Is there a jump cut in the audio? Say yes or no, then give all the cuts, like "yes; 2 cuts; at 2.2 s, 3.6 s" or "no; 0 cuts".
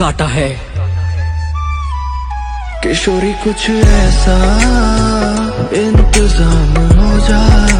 no; 0 cuts